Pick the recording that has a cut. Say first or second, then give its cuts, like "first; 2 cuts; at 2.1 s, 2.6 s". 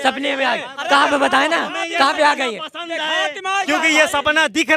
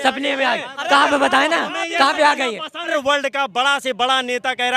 second; 1 cut; at 2.9 s